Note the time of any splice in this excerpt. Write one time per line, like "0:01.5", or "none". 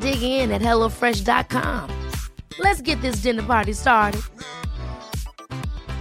none